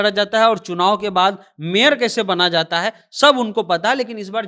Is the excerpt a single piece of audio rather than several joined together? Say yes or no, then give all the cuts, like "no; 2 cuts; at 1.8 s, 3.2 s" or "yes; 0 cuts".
yes; 0 cuts